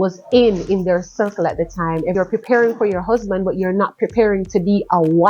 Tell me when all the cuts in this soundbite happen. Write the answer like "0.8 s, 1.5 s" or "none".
2.1 s